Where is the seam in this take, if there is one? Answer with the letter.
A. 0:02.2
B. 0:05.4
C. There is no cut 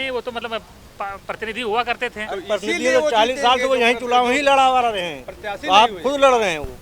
C